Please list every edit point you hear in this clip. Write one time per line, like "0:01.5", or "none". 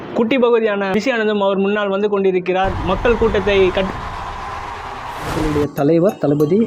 0:05.5